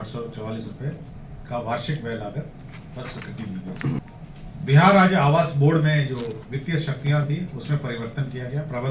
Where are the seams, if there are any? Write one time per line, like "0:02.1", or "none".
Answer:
0:04.0

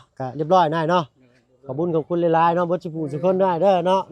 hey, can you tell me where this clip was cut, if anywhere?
none

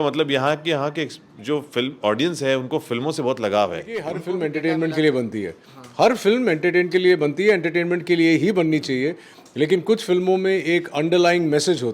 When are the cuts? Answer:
0:04.3

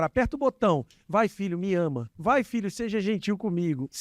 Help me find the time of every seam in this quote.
0:02.1

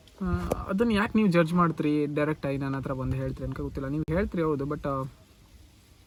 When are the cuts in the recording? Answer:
none

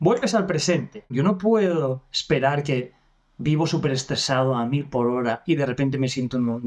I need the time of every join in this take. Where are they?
0:01.1

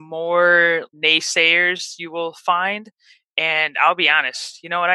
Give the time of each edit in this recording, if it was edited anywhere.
0:00.9

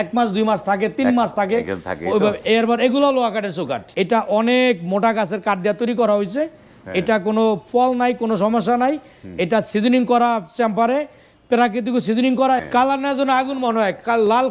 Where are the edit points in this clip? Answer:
0:03.8
0:12.6

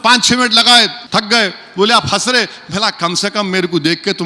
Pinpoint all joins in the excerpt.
0:01.0

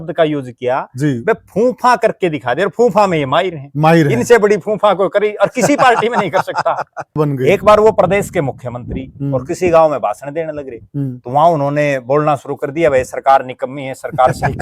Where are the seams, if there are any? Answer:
0:07.1

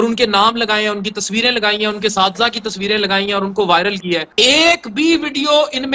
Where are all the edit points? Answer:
0:04.3

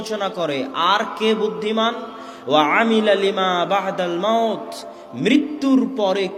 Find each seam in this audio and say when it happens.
none

